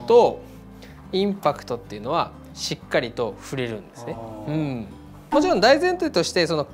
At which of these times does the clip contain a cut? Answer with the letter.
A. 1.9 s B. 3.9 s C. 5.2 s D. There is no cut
C